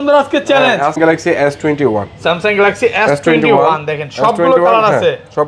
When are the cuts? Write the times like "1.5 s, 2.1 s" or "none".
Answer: 1.0 s